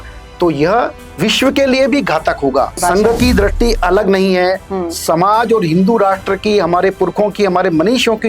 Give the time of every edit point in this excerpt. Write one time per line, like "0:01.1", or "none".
0:02.8